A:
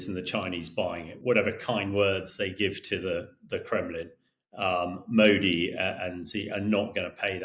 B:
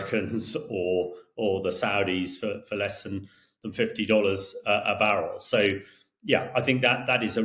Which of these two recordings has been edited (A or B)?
A